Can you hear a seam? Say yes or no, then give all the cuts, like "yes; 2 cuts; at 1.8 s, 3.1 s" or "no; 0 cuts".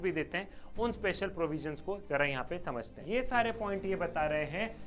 yes; 1 cut; at 3.0 s